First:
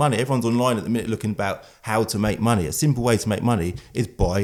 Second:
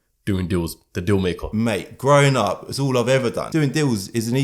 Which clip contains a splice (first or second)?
second